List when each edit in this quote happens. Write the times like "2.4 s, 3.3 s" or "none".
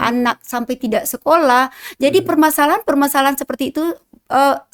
none

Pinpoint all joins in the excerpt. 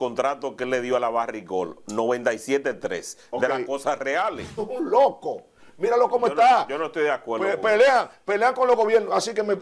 4.6 s

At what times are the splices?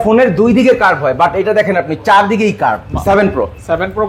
2.9 s

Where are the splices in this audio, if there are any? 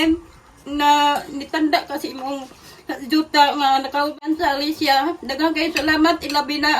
4.2 s

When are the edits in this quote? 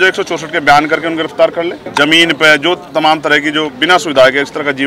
1.8 s

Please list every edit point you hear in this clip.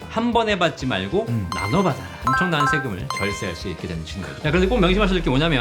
2.2 s

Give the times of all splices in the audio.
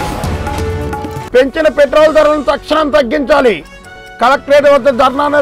none

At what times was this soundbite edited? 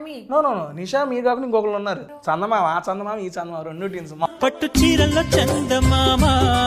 2.1 s, 4.3 s

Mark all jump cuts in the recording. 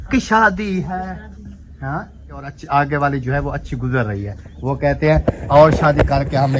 2.5 s

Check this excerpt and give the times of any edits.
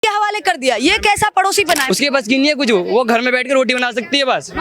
1.8 s

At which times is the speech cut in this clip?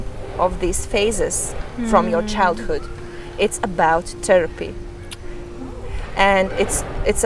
none

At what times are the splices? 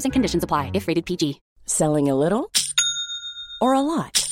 1.4 s

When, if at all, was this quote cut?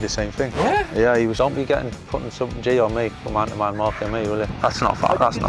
1.3 s, 4.5 s

